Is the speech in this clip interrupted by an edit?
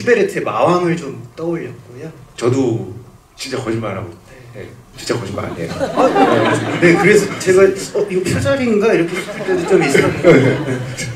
no; 0 cuts

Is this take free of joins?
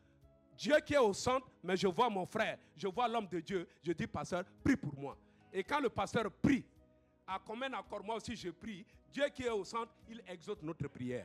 yes; 0 cuts

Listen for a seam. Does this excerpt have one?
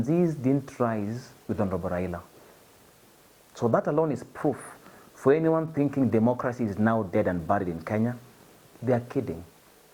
no; 0 cuts

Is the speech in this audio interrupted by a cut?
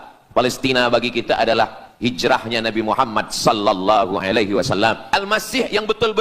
yes; 1 cut; at 5.0 s

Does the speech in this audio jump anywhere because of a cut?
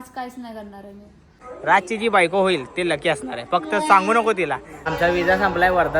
yes; 2 cuts; at 1.5 s, 4.9 s

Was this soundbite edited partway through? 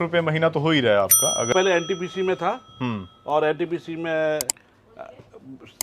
yes; 1 cut; at 1.5 s

